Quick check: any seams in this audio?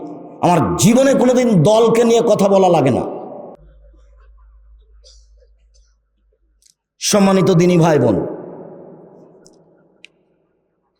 no; 0 cuts

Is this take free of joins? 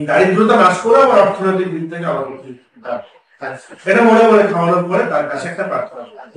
yes; 0 cuts

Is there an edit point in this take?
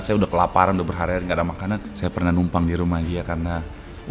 yes; 1 cut; at 1.9 s

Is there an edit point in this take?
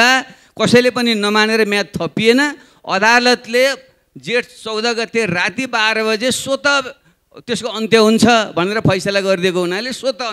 no; 0 cuts

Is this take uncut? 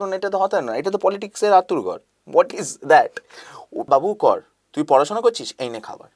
no; 1 cut; at 3.9 s

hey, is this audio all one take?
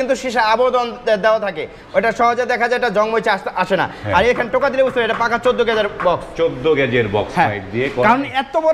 yes; 0 cuts

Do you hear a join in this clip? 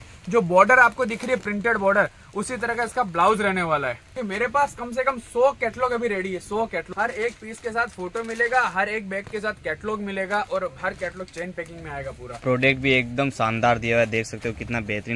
yes; 3 cuts; at 4.1 s, 6.9 s, 12.2 s

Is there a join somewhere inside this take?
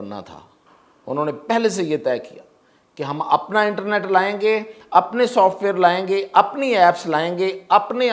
no; 0 cuts

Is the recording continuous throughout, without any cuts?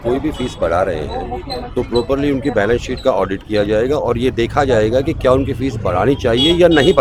yes; 0 cuts

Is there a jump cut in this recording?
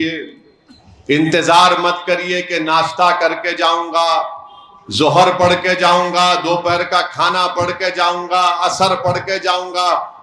no; 0 cuts

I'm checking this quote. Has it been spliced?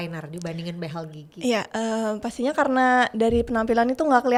no; 0 cuts

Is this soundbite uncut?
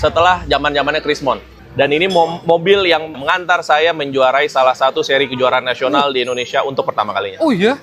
no; 2 cuts; at 1.6 s, 3.2 s

